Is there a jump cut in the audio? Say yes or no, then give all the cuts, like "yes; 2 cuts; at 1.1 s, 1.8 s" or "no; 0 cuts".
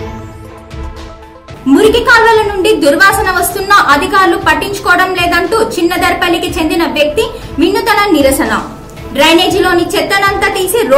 yes; 1 cut; at 1.0 s